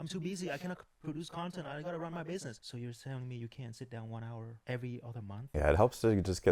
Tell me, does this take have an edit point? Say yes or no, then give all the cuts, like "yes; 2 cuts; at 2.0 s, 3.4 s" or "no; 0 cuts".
yes; 3 cuts; at 2.6 s, 4.6 s, 5.5 s